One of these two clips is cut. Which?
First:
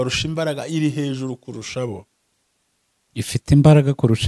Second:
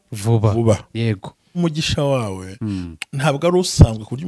second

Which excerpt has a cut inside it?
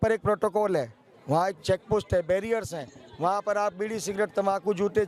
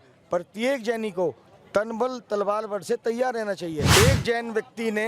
second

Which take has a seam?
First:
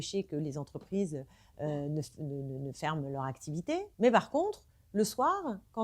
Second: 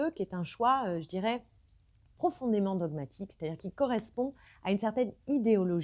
first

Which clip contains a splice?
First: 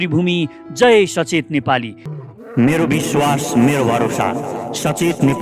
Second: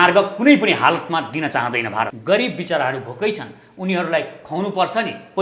second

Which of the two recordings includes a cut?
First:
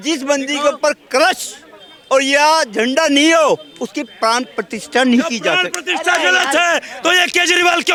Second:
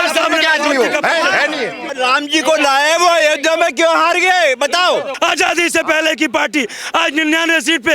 second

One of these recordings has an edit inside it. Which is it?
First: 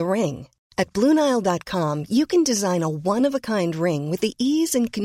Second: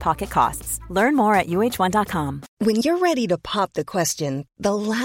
second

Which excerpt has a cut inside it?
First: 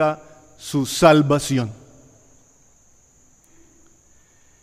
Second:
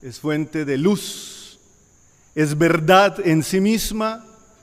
second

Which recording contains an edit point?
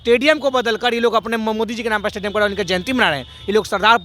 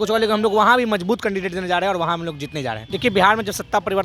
second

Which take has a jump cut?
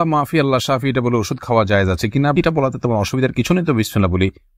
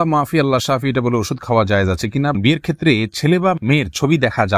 second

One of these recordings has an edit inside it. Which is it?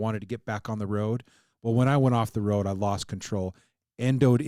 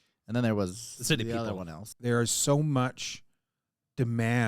second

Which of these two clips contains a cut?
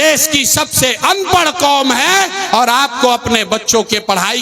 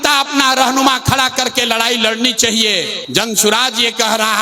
second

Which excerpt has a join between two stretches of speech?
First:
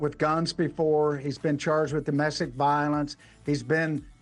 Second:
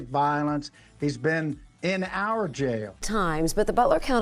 second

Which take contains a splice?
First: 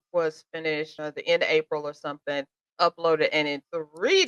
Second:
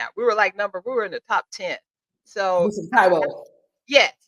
first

